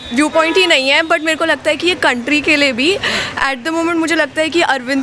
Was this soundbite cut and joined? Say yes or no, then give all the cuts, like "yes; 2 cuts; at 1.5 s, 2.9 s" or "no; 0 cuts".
no; 0 cuts